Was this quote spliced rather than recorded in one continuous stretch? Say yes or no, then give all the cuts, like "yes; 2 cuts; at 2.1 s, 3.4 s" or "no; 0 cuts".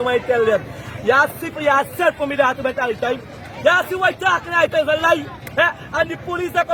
no; 0 cuts